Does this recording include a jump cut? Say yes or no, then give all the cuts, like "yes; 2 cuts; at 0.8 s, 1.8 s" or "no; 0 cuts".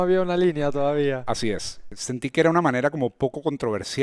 yes; 1 cut; at 1.8 s